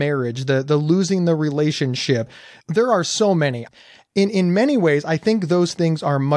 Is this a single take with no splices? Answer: no; 2 cuts; at 2.3 s, 3.6 s

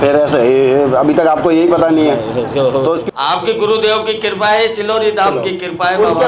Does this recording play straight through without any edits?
no; 1 cut; at 3.0 s

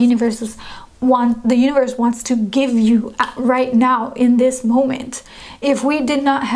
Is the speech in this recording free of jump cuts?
yes; 0 cuts

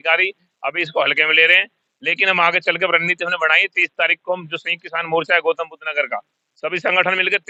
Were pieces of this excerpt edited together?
no; 0 cuts

